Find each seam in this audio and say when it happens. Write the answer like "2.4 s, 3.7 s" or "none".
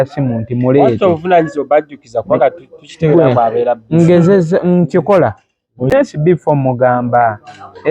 5.9 s